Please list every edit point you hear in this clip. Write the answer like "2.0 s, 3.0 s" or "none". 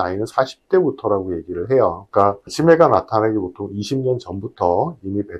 2.0 s